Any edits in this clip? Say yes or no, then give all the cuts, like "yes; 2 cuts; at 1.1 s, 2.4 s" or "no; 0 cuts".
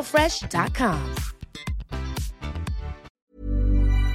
yes; 1 cut; at 3.1 s